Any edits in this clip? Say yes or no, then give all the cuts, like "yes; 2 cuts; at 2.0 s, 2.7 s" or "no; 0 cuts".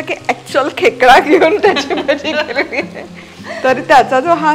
no; 0 cuts